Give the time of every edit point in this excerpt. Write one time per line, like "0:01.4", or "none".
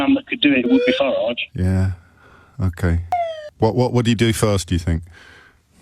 none